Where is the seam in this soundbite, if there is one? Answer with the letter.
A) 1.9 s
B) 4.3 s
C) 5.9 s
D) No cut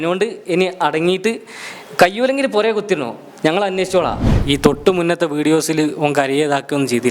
B